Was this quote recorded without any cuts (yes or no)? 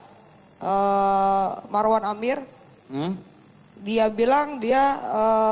yes